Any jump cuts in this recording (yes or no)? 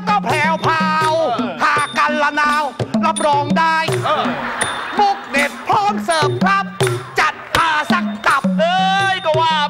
no